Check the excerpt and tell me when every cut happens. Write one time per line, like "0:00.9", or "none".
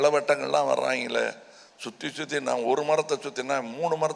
none